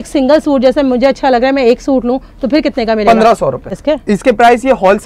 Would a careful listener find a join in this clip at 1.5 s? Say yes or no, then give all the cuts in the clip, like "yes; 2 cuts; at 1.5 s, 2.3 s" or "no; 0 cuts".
no; 1 cut; at 3.7 s